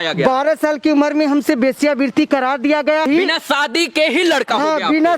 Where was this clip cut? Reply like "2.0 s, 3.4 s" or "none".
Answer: 3.1 s